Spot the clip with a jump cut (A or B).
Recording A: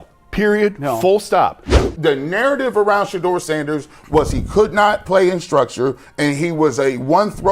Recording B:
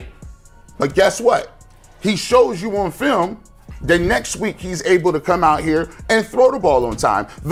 A